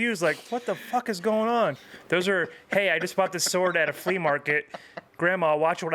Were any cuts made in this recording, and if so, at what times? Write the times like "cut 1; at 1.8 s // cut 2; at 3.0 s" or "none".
cut 1; at 1.8 s